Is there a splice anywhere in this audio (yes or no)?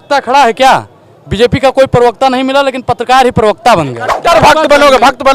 yes